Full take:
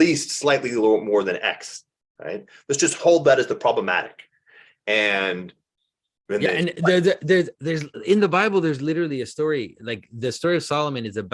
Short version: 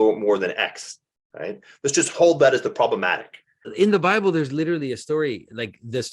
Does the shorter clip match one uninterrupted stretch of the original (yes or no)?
no